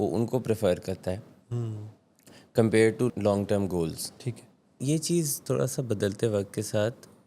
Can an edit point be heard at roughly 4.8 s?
yes; 2 cuts; at 3.1 s, 4.8 s

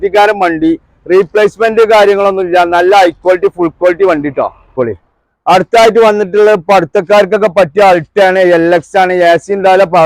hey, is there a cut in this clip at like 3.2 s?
no; 1 cut; at 4.7 s

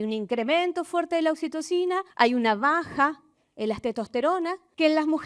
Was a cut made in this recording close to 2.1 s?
no; 0 cuts

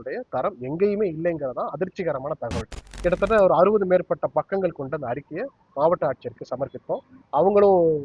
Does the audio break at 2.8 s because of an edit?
yes; 1 cut; at 2.8 s

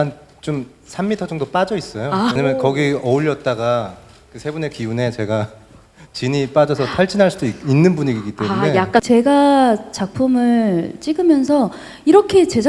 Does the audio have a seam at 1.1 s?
no; 2 cuts; at 2.4 s, 9.0 s

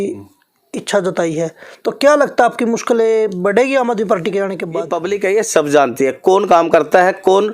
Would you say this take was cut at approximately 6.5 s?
no; 1 cut; at 4.9 s

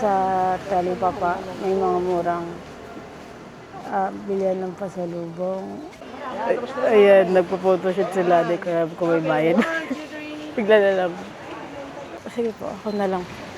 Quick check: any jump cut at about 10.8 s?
no; 2 cuts; at 6.2 s, 12.2 s

